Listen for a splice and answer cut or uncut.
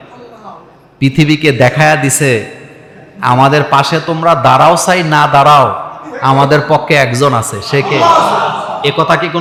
uncut